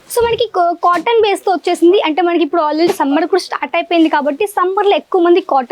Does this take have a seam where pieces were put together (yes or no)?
no